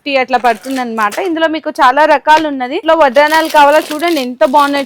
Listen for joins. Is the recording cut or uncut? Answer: cut